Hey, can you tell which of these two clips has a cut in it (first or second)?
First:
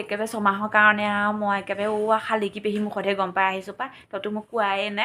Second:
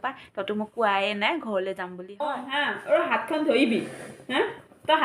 second